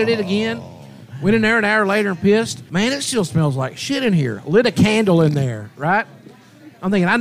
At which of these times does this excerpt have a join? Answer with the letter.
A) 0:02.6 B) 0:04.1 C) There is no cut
A